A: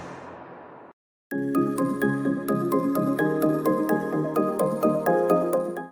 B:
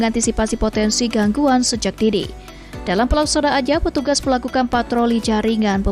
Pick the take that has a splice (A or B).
A